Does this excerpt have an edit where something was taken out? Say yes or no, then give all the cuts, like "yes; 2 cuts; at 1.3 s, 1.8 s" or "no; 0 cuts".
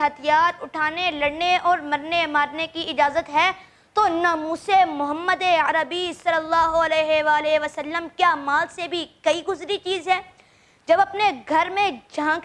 no; 0 cuts